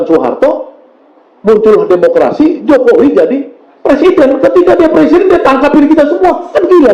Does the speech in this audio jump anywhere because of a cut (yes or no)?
no